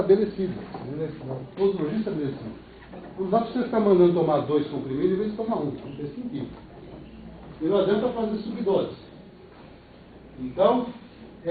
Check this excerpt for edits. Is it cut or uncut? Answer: uncut